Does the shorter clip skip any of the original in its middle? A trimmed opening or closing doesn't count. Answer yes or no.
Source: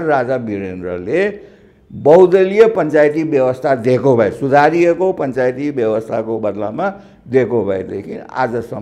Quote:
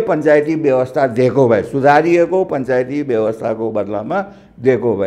no